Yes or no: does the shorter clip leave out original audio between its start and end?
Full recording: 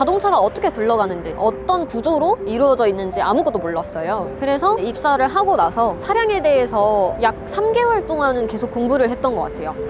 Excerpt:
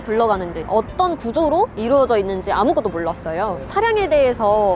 yes